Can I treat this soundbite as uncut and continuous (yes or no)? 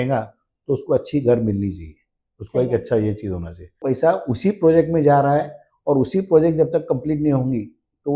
no